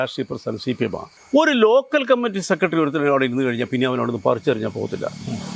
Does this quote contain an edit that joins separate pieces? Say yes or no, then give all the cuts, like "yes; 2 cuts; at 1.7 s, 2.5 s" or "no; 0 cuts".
yes; 1 cut; at 1.1 s